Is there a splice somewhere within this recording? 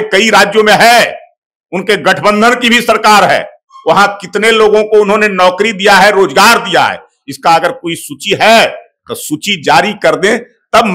no; 0 cuts

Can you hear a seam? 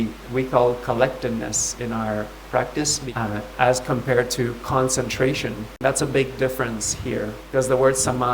yes; 3 cuts; at 3.0 s, 5.6 s, 7.4 s

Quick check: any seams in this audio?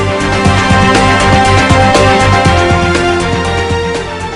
no; 0 cuts

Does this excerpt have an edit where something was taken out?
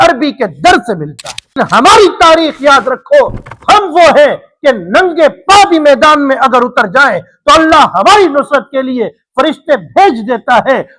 yes; 1 cut; at 1.5 s

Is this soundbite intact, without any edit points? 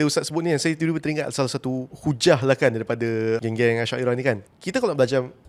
no; 3 cuts; at 1.9 s, 3.4 s, 4.5 s

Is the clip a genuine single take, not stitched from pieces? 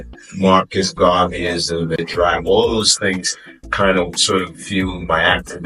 no; 1 cut; at 2.0 s

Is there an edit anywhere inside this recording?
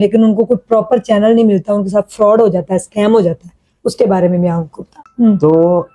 yes; 1 cut; at 5.0 s

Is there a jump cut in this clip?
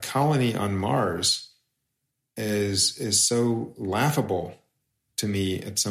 no; 0 cuts

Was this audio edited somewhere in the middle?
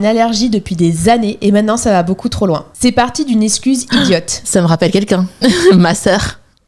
no; 0 cuts

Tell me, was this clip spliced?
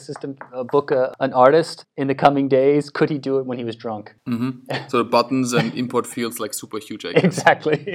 yes; 1 cut; at 4.1 s

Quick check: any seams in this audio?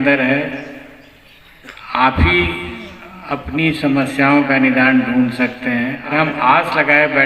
yes; 1 cut; at 6.1 s

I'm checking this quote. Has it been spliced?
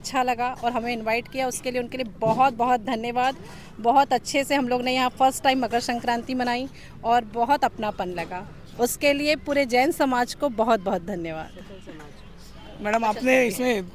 no; 0 cuts

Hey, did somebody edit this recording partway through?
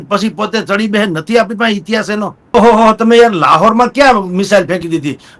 yes; 1 cut; at 2.5 s

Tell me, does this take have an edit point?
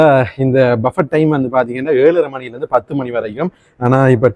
no; 0 cuts

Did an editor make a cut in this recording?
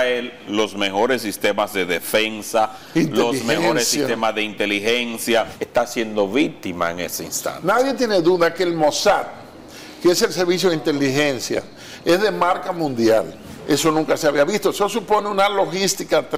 yes; 2 cuts; at 5.6 s, 13.5 s

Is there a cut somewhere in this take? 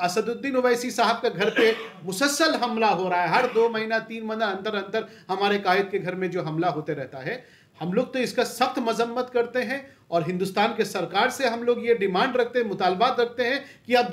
no; 0 cuts

